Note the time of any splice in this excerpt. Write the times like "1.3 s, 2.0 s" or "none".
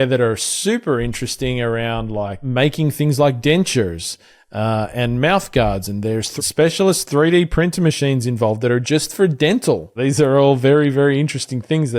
2.4 s, 6.3 s, 9.9 s